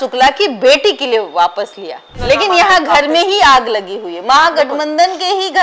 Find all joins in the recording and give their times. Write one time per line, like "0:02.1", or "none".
0:02.1